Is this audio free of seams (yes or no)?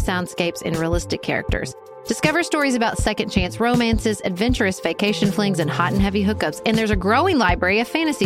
yes